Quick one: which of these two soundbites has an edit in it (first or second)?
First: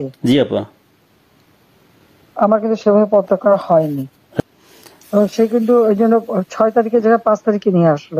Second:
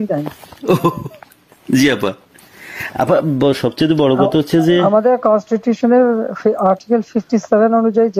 first